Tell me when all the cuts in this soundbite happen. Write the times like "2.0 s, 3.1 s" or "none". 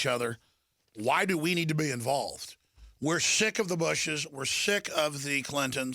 2.7 s